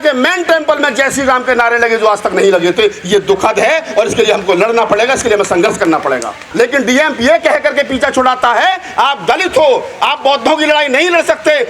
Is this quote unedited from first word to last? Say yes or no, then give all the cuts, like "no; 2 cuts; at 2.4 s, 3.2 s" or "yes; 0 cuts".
no; 1 cut; at 6.4 s